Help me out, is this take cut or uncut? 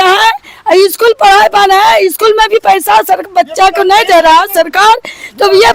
uncut